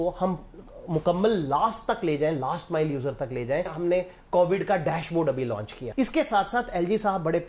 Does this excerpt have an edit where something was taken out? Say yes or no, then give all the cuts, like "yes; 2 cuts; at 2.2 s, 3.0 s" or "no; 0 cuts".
yes; 2 cuts; at 3.7 s, 5.8 s